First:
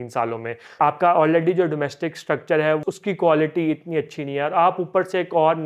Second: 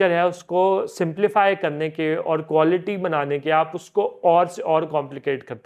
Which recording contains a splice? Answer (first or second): first